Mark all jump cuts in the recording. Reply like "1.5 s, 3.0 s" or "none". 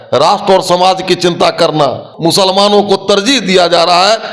2.1 s